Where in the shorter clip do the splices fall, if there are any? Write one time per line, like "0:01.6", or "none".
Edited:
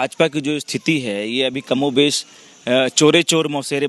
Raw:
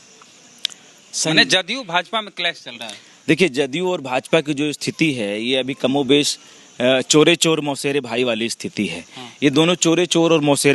none